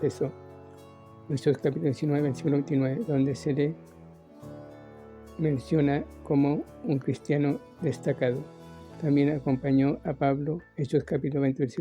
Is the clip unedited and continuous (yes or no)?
no